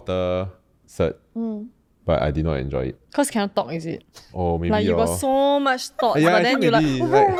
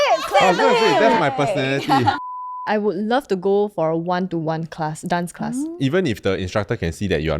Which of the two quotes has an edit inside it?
second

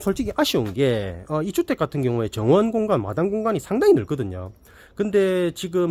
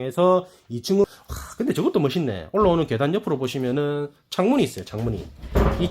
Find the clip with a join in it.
second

